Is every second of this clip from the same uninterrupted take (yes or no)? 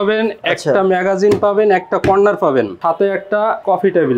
no